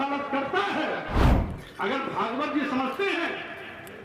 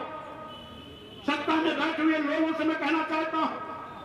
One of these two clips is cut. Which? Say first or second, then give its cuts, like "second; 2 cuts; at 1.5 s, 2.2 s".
first; 1 cut; at 1.3 s